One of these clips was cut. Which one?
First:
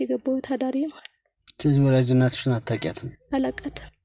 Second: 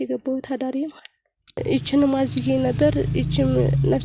second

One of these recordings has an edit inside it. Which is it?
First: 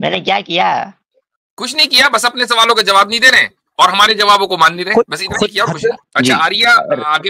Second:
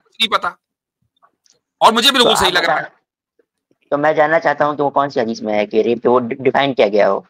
first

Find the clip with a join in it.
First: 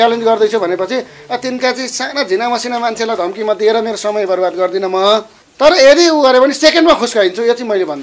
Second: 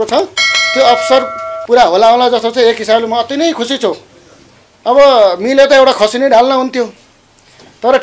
first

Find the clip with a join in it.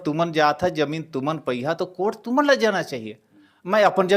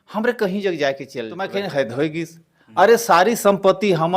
second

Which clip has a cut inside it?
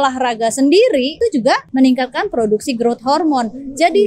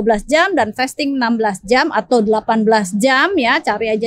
first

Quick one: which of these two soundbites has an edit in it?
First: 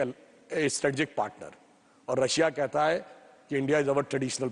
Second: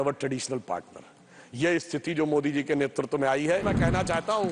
second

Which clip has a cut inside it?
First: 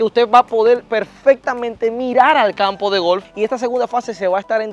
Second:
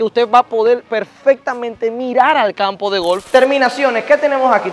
second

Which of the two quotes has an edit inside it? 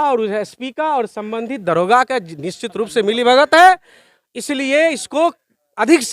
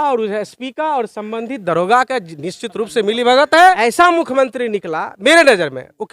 second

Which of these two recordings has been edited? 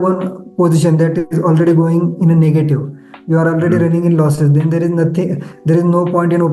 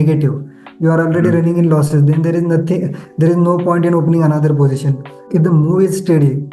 second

